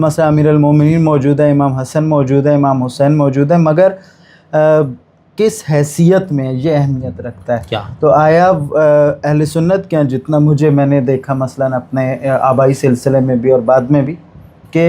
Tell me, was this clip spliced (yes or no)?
no